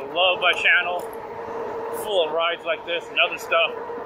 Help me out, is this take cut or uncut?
uncut